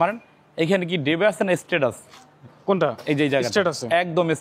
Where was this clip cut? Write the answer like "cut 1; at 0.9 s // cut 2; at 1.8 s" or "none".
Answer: none